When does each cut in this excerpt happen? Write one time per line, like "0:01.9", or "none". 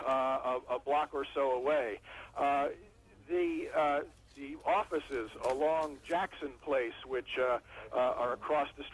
0:01.2